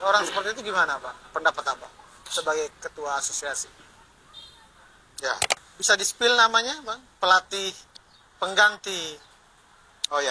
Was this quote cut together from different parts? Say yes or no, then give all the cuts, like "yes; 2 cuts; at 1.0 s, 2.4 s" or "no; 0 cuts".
yes; 1 cut; at 5.5 s